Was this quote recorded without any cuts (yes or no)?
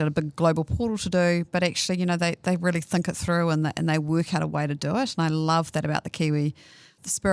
yes